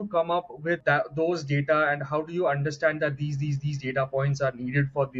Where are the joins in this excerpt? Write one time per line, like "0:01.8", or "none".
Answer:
none